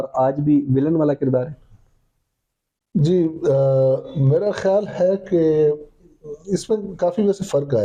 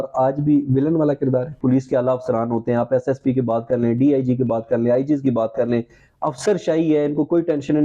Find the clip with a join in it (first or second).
second